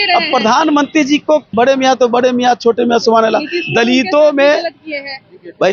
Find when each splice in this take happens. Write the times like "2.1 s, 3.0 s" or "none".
1.5 s